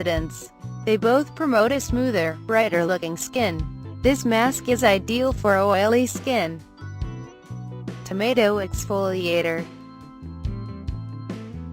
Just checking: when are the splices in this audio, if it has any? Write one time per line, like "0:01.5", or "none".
0:05.2